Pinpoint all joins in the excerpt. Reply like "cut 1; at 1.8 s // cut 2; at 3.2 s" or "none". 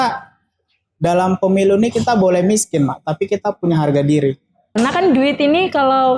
cut 1; at 4.7 s